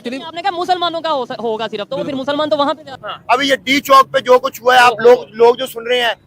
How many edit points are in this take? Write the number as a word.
one